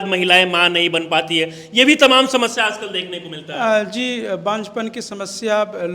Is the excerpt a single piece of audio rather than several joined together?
yes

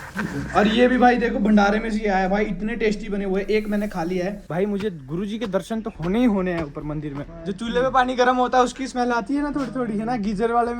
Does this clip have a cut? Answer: yes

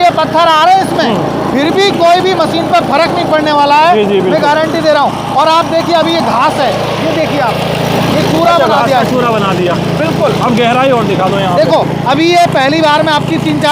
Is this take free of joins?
yes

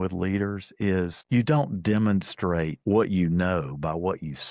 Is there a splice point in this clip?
yes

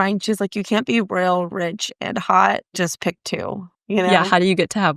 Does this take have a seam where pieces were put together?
no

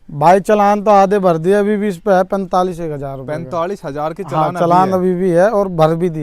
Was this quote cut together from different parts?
no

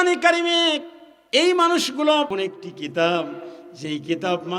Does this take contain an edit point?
yes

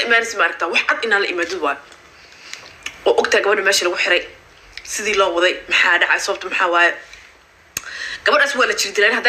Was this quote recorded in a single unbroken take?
yes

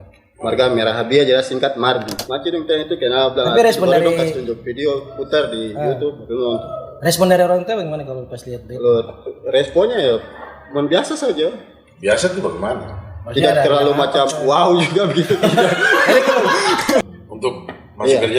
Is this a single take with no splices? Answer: no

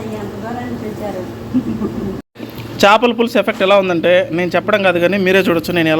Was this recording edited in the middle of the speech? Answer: yes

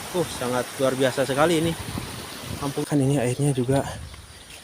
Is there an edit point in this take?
yes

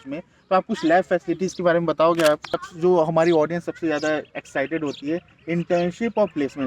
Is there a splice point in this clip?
yes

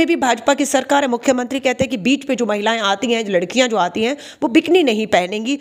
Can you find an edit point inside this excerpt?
no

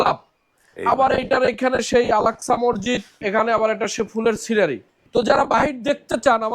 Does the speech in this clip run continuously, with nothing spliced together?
no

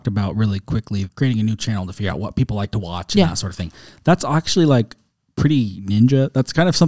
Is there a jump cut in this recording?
yes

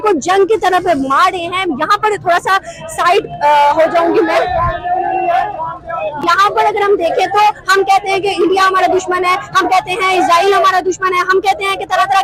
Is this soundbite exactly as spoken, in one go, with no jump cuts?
yes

